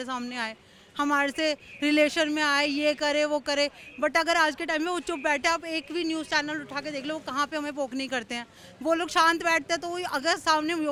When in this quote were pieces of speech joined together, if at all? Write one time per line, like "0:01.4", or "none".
none

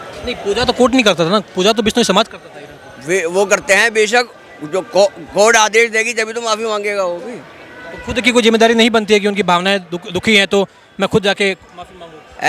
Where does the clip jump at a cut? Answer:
none

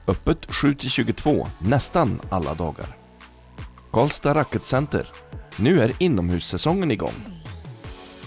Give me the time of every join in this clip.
0:07.2

